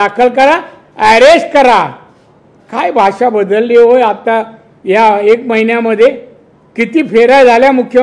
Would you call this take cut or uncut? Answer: uncut